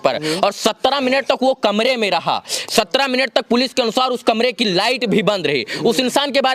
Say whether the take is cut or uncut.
uncut